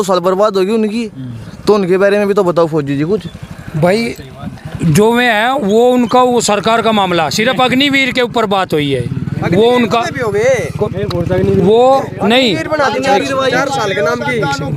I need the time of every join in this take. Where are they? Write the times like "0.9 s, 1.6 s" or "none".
none